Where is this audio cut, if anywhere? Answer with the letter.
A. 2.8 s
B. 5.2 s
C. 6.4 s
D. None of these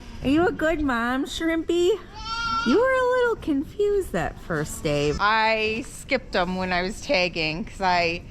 B